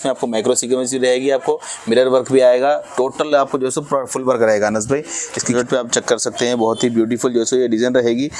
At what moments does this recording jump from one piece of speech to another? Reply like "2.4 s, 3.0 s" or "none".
5.5 s

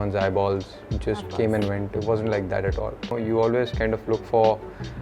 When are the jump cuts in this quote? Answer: 3.1 s

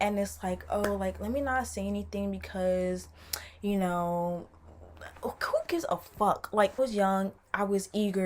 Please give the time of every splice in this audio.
6.8 s

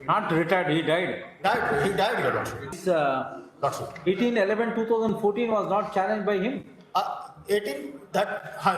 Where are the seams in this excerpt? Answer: 2.8 s

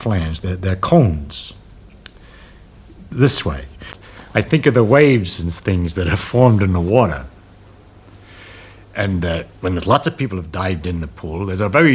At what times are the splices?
3.9 s

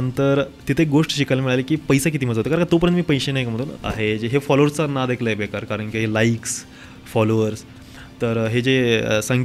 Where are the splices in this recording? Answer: 3.7 s

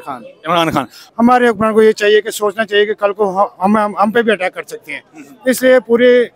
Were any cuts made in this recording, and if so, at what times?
1.0 s

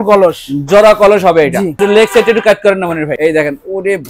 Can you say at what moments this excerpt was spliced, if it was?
1.7 s, 3.1 s

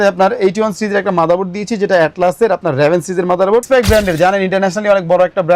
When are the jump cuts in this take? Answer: 3.7 s

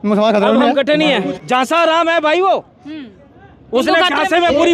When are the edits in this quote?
1.3 s

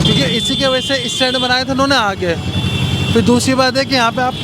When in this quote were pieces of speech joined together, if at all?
none

